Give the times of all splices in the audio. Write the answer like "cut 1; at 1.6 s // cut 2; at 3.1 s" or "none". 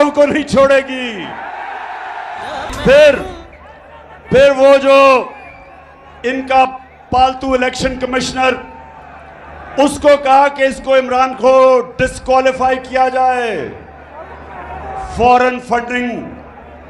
none